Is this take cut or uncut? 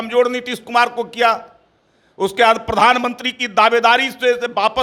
uncut